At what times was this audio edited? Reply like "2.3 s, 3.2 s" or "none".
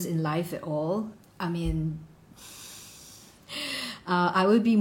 1.2 s